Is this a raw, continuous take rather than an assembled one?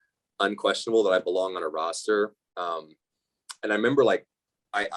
yes; 0 cuts

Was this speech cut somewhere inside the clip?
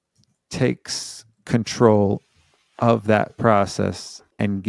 no; 0 cuts

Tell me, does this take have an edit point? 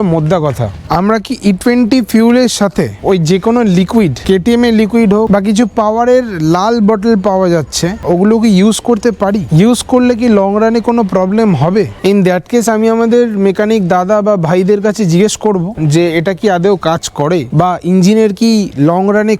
yes; 4 cuts; at 0.8 s, 5.3 s, 8.0 s, 11.9 s

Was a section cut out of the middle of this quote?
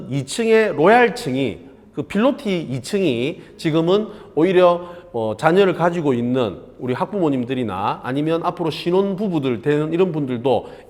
no; 0 cuts

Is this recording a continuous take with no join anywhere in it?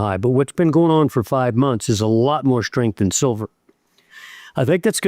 yes; 0 cuts

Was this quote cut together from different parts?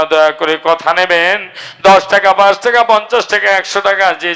no; 0 cuts

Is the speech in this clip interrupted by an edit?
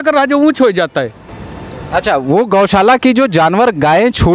no; 0 cuts

